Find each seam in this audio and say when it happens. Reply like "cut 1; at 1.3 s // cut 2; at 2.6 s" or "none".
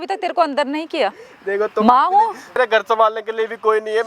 cut 1; at 2.6 s